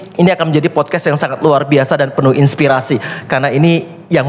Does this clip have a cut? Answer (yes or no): no